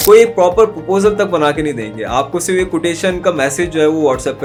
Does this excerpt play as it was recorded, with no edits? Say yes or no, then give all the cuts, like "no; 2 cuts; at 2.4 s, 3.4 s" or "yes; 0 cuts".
yes; 0 cuts